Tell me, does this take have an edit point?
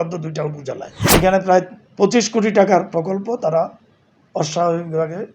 yes; 1 cut; at 0.9 s

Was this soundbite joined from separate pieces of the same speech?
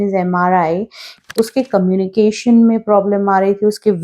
yes; 1 cut; at 1.3 s

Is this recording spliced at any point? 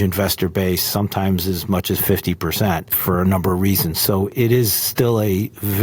yes; 2 cuts; at 2.9 s, 4.3 s

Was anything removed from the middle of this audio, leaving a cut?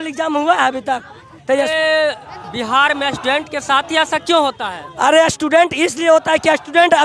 no; 0 cuts

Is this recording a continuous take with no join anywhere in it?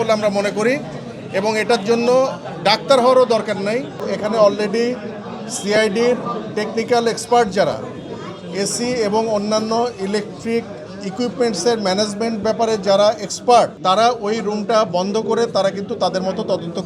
no; 2 cuts; at 4.0 s, 13.8 s

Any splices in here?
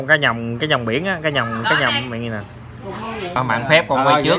yes; 1 cut; at 3.4 s

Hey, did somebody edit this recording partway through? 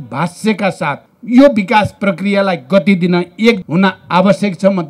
yes; 2 cuts; at 1.1 s, 3.6 s

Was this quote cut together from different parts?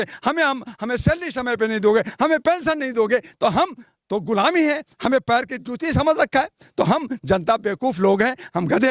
no; 0 cuts

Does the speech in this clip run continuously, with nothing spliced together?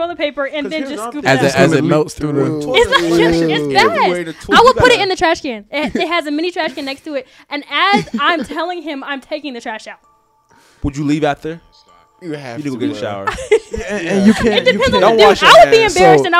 yes; 0 cuts

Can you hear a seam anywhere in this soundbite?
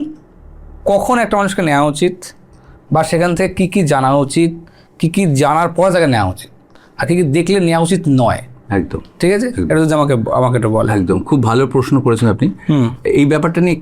no; 0 cuts

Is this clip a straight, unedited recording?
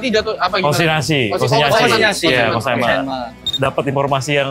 no; 1 cut; at 3.4 s

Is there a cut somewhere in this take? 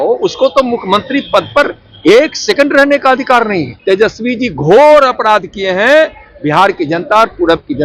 yes; 1 cut; at 3.7 s

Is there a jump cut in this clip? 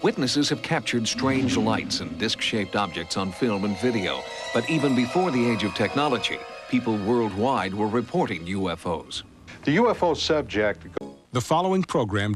no; 0 cuts

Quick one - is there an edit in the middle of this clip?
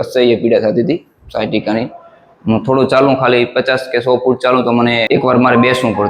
yes; 1 cut; at 5.1 s

